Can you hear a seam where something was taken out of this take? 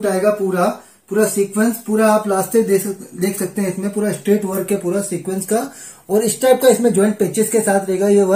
no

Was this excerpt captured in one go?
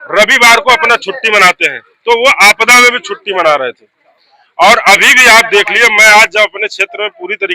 yes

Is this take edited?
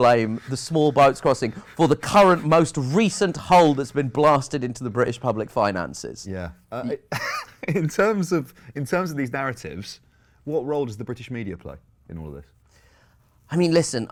no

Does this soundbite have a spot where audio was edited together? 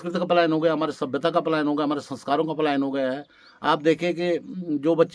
no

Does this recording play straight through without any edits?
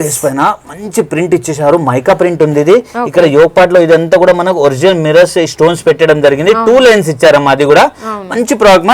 yes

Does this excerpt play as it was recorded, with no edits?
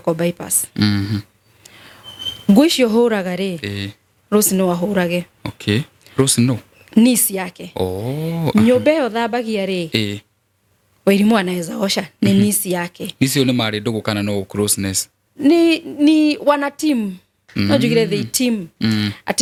yes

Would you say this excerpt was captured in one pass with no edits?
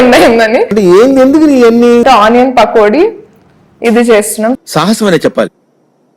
no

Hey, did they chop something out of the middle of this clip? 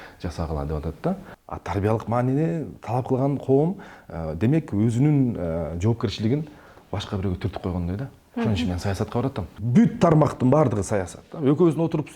yes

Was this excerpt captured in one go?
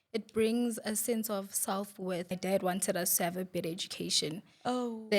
no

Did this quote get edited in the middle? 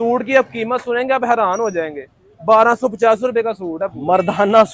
no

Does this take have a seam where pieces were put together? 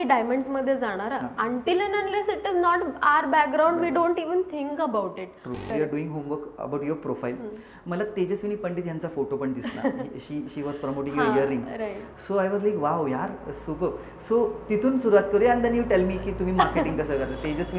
yes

